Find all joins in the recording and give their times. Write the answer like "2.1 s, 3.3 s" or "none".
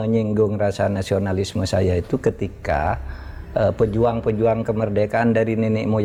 none